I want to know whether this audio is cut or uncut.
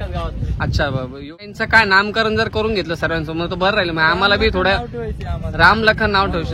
cut